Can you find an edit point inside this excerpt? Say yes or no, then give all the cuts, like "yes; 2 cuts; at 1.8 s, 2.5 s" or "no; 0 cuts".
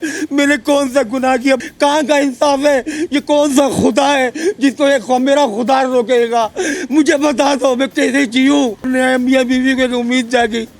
yes; 2 cuts; at 1.6 s, 8.8 s